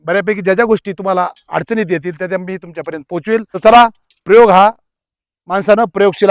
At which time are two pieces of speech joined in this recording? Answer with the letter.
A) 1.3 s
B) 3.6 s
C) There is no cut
B